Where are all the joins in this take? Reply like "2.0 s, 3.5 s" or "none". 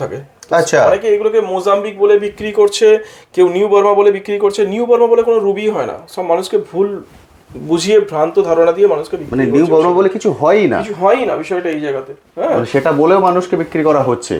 none